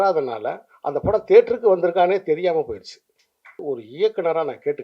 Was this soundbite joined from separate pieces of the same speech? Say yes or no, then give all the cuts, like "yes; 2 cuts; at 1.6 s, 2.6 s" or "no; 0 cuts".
yes; 1 cut; at 3.6 s